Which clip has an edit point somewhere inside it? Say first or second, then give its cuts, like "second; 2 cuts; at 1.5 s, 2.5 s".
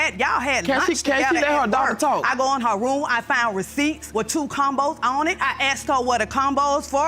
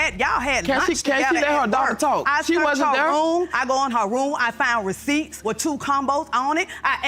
first; 2 cuts; at 2.3 s, 5.4 s